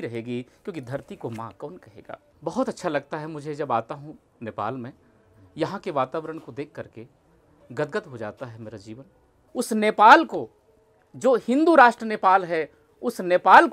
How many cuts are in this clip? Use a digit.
2